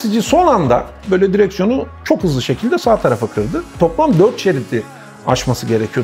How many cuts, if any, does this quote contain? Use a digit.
1